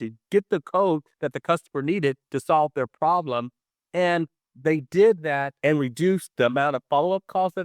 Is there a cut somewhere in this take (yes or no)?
yes